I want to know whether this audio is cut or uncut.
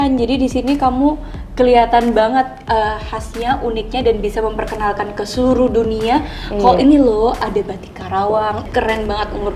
cut